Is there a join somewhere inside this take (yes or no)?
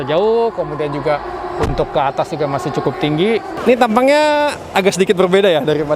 yes